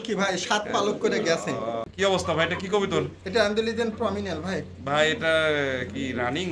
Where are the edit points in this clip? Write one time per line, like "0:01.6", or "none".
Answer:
0:01.9